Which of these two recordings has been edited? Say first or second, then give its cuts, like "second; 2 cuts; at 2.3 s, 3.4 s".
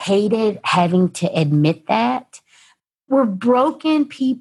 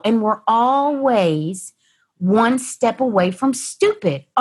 first; 1 cut; at 2.9 s